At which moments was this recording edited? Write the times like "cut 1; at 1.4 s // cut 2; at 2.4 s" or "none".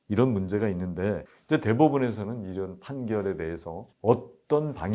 cut 1; at 1.3 s // cut 2; at 3.9 s